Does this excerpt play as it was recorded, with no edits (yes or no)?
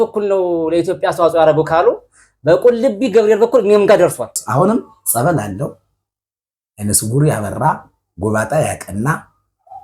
no